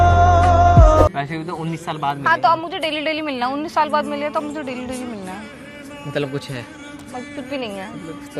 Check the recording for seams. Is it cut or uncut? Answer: cut